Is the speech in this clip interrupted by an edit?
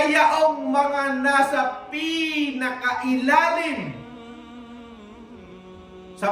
no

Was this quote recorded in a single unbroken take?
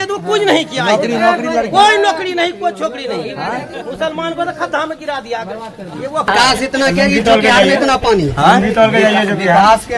no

